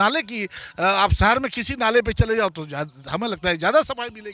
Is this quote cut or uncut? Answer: uncut